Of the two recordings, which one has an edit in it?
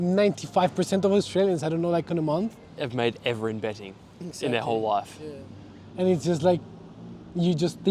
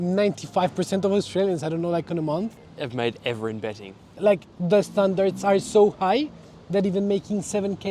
second; 1 cut; at 4.1 s

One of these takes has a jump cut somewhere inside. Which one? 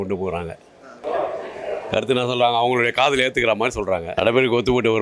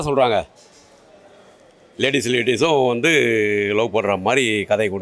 first; 2 cuts; at 1.0 s, 4.1 s

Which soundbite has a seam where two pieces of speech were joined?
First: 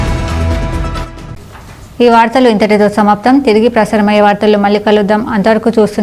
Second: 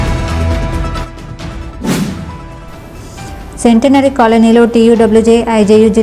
second; 1 cut; at 1.2 s

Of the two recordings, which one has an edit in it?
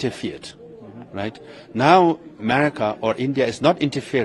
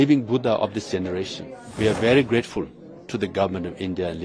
second; 1 cut; at 1.6 s

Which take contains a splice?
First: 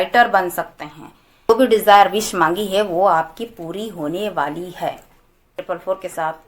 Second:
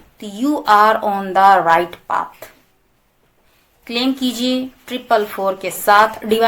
first; 2 cuts; at 1.5 s, 5.5 s

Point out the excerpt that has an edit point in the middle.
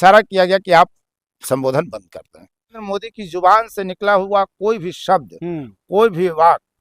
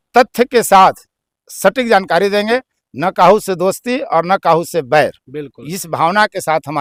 first; 1 cut; at 2.8 s

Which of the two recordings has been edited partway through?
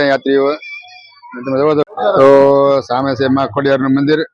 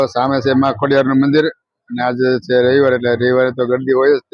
first; 1 cut; at 1.8 s

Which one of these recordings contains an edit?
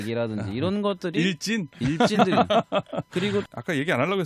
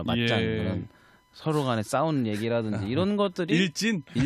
first; 1 cut; at 3.1 s

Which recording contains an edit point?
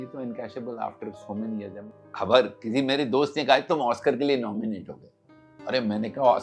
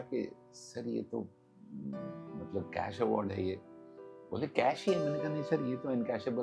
first; 1 cut; at 1.7 s

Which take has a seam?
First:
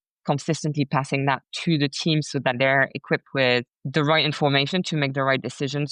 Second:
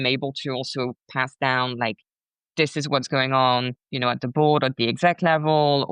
first; 1 cut; at 3.8 s

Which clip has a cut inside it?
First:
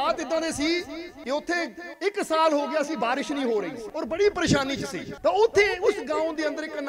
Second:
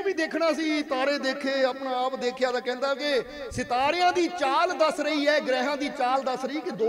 first; 4 cuts; at 1.1 s, 1.9 s, 3.8 s, 5.0 s

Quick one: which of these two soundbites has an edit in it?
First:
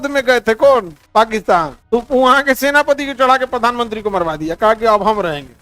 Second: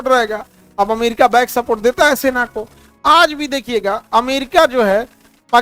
first; 2 cuts; at 1.0 s, 1.8 s

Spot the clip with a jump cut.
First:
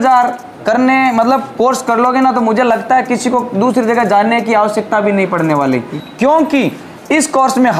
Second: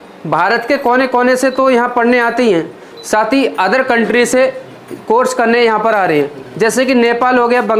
first; 1 cut; at 5.9 s

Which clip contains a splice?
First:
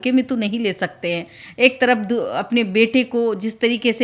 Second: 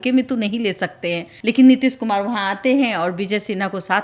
second; 1 cut; at 1.3 s

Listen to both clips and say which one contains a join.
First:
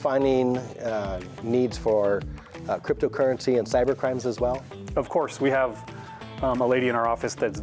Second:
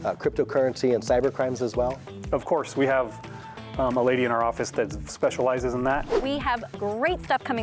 second; 1 cut; at 6.1 s

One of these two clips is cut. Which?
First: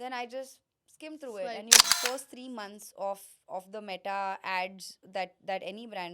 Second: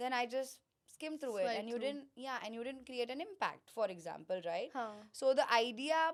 first; 1 cut; at 1.8 s

